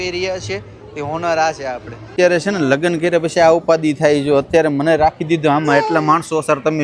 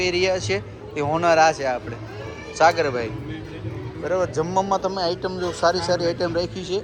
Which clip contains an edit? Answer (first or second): first